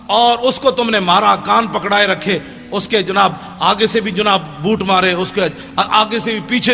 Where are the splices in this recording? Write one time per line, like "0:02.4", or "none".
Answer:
none